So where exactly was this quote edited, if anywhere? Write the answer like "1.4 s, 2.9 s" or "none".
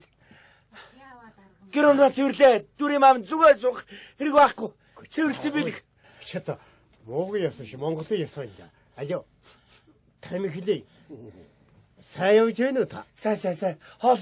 5.9 s